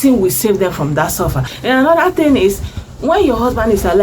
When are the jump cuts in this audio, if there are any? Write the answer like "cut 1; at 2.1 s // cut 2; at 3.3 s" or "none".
cut 1; at 1.5 s

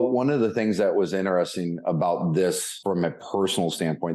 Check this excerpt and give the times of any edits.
cut 1; at 2.7 s

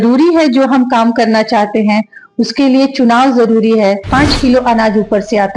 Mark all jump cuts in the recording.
cut 1; at 4.1 s

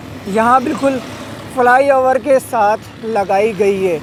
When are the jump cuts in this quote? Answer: none

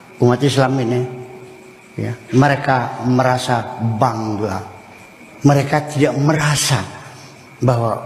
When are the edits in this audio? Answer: none

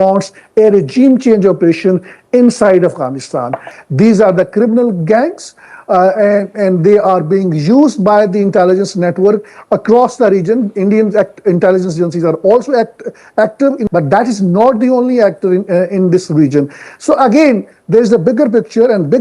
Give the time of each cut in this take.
cut 1; at 3.7 s // cut 2; at 13.8 s

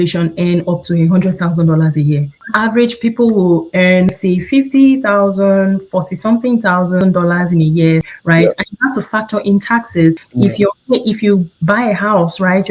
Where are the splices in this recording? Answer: cut 1; at 2.4 s // cut 2; at 4.2 s // cut 3; at 7.0 s // cut 4; at 8.1 s // cut 5; at 10.3 s

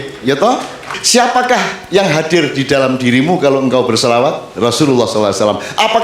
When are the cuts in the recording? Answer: cut 1; at 1.0 s // cut 2; at 4.5 s

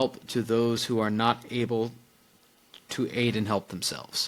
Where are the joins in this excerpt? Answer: none

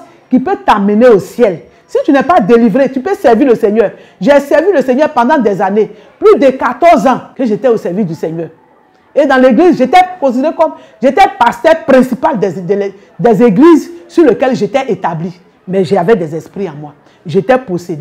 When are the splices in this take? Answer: cut 1; at 7.3 s

